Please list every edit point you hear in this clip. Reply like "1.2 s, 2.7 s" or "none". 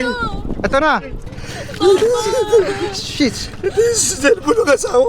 1.2 s